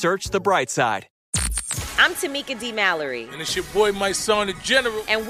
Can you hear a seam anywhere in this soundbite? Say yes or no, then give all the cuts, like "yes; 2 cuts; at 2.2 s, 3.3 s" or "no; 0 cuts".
yes; 1 cut; at 1.1 s